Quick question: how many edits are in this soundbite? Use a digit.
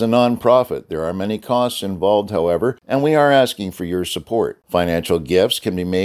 1